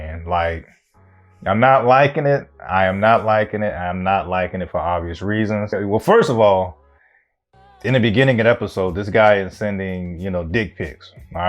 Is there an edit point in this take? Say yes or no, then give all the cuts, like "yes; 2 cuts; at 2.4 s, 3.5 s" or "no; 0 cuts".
yes; 1 cut; at 5.8 s